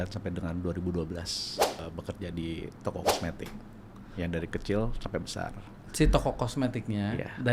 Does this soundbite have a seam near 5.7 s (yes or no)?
no